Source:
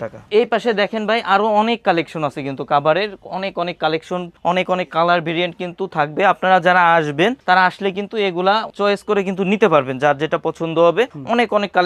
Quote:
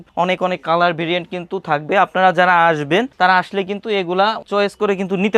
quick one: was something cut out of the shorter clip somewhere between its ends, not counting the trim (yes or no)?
no